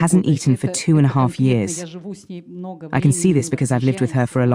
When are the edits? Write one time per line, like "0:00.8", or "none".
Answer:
none